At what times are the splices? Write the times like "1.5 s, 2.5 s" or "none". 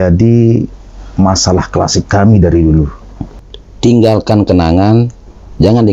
3.4 s

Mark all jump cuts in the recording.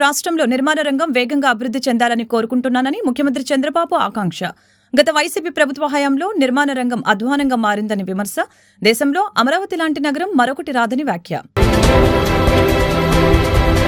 none

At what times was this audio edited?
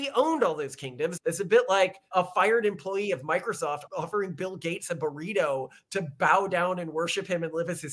1.1 s, 2.1 s, 3.8 s

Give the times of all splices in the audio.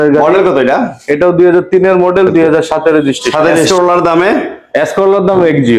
3.7 s

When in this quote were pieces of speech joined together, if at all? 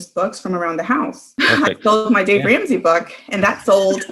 1.2 s

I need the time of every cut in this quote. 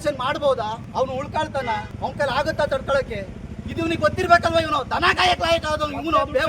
0.8 s, 1.9 s

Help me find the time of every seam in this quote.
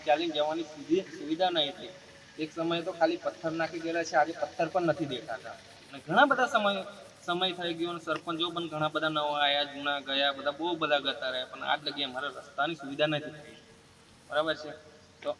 none

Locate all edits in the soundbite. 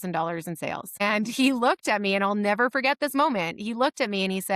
1.0 s

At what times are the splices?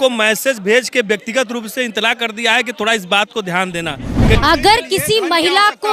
4.4 s

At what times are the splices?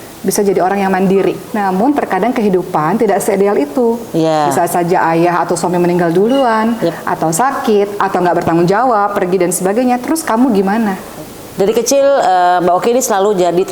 1.5 s, 11.1 s

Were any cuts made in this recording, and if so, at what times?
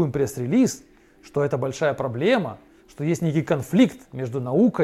none

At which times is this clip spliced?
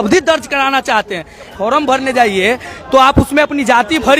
1.5 s

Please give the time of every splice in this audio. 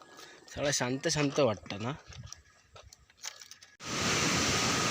3.6 s

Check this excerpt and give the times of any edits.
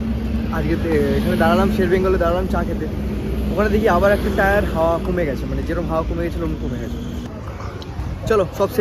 7.3 s

